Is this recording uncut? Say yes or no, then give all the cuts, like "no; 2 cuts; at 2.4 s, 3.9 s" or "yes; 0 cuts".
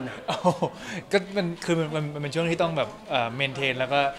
yes; 0 cuts